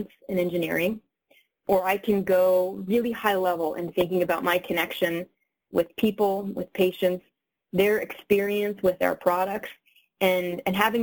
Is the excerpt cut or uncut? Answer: cut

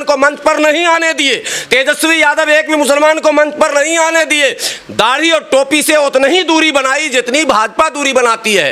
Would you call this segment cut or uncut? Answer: uncut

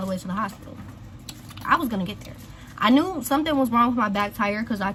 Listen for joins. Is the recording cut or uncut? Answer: uncut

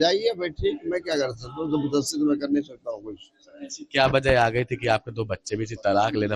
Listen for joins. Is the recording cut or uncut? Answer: cut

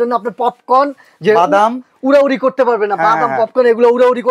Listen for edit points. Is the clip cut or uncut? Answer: uncut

